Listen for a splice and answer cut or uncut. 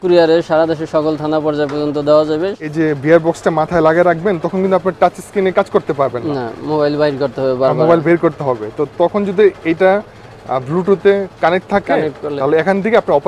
cut